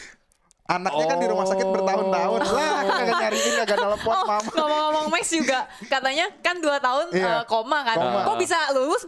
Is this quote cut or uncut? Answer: uncut